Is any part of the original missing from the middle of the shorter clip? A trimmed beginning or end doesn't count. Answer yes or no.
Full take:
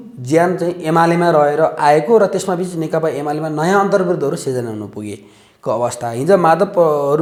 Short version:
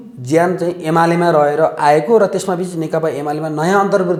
no